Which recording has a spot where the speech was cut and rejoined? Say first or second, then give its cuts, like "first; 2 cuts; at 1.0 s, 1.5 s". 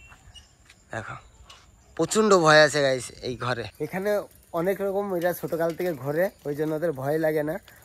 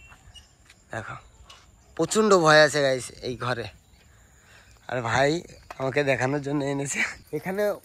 first; 1 cut; at 3.7 s